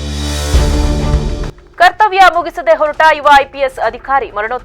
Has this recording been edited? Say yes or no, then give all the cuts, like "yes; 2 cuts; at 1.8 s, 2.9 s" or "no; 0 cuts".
yes; 1 cut; at 1.5 s